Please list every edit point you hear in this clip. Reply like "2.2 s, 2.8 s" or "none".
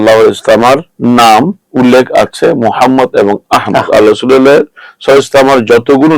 0.9 s, 1.6 s